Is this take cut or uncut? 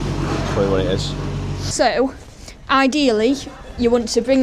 cut